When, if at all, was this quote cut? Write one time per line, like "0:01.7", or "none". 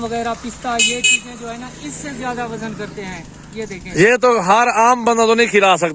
none